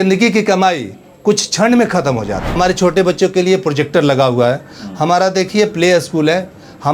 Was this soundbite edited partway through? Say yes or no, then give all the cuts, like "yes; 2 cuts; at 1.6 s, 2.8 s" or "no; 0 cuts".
yes; 1 cut; at 2.6 s